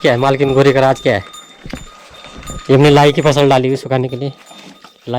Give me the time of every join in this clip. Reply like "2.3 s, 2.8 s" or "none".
none